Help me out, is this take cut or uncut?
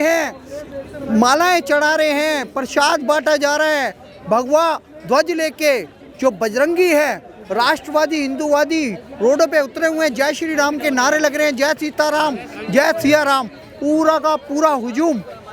uncut